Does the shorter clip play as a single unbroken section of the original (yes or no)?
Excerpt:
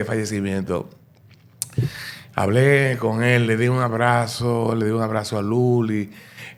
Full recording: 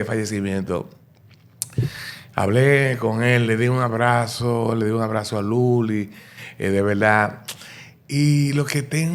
yes